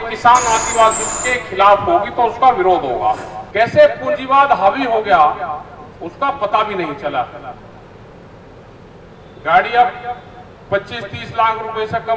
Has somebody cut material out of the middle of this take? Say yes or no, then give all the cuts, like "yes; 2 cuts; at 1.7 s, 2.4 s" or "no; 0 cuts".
yes; 1 cut; at 3.4 s